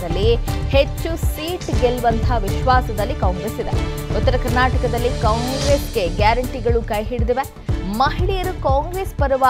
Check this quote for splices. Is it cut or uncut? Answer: cut